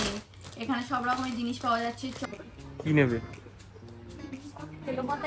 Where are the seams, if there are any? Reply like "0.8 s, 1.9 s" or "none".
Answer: 2.2 s